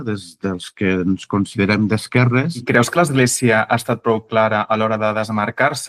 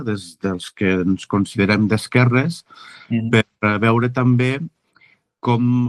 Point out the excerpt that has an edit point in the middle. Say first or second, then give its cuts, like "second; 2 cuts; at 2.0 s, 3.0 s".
first; 1 cut; at 2.6 s